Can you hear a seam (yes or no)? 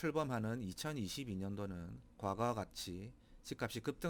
no